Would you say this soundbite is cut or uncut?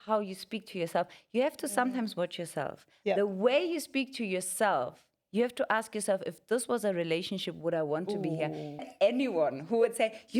cut